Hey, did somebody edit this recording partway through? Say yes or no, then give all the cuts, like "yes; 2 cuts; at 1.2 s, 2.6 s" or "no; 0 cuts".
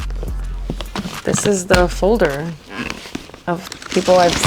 no; 0 cuts